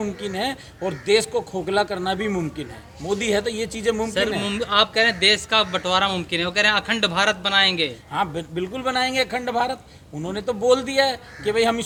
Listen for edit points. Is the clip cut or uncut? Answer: uncut